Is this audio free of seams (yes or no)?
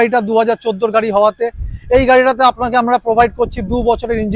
yes